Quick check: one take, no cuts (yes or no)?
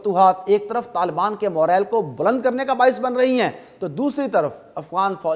yes